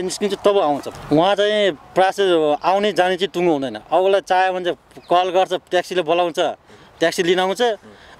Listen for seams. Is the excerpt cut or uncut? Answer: cut